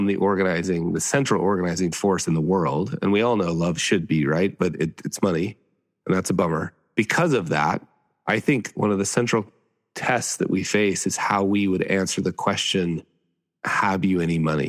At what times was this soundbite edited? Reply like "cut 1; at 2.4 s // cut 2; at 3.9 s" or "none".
cut 1; at 8.7 s